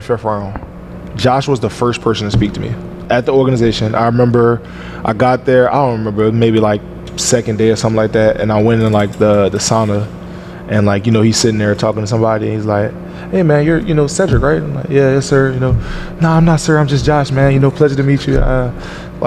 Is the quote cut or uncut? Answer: cut